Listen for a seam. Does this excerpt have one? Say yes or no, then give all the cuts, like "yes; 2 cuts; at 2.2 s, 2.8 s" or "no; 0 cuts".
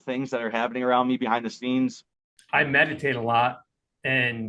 yes; 1 cut; at 2.1 s